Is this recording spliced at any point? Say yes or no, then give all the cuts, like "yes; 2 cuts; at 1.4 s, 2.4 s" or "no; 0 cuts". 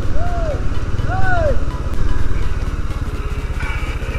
no; 0 cuts